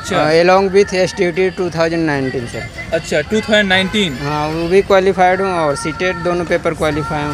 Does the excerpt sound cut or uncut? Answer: uncut